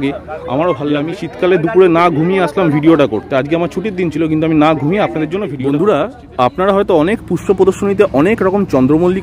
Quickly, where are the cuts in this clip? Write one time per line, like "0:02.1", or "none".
0:01.2
0:05.5